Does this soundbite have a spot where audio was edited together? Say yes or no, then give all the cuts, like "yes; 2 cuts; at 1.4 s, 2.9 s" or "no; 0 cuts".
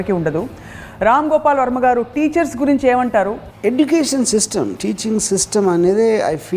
yes; 1 cut; at 3.4 s